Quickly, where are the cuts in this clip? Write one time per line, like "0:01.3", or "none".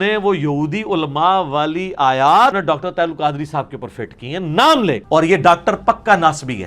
0:02.5
0:05.0